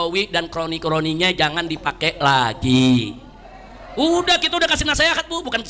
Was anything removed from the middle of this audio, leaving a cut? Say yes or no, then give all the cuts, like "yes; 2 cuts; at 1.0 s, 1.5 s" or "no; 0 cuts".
no; 0 cuts